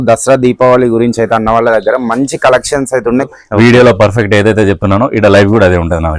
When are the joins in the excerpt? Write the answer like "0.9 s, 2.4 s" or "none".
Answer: 3.3 s